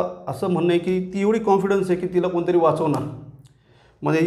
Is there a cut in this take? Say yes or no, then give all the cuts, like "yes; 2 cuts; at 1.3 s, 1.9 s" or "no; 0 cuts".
no; 0 cuts